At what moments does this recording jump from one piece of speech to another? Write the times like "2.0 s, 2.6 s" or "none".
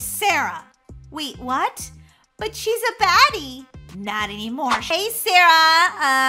4.9 s